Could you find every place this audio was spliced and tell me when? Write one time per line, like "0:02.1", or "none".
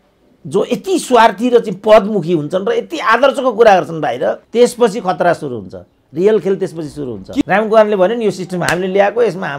0:04.4
0:07.4